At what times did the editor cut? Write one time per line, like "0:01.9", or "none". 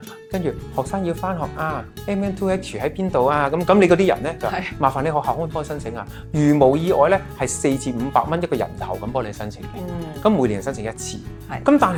none